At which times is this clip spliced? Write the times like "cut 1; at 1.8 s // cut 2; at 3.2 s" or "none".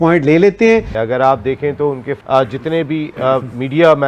cut 1; at 0.9 s // cut 2; at 2.1 s